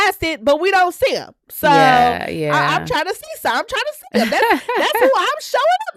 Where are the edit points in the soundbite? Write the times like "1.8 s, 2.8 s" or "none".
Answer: none